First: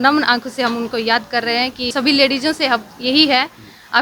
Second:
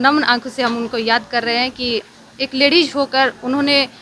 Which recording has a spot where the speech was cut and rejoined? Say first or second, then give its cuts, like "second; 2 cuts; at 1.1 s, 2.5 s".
first; 1 cut; at 1.9 s